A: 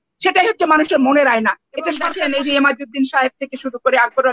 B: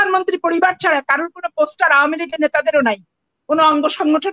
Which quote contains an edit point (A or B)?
A